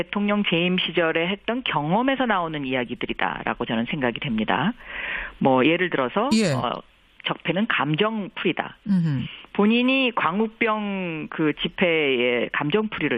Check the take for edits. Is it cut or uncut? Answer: uncut